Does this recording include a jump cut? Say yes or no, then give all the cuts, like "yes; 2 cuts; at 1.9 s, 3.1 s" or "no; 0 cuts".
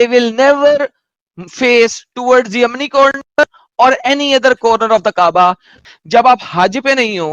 yes; 1 cut; at 5.7 s